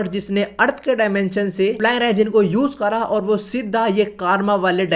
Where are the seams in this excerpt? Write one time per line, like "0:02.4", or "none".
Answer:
none

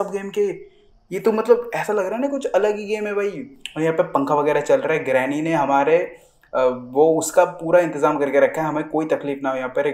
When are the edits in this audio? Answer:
none

